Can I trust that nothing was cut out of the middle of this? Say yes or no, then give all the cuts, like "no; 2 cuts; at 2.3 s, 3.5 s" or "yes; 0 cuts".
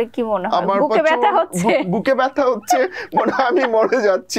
yes; 0 cuts